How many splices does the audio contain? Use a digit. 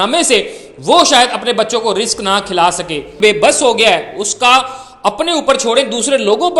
1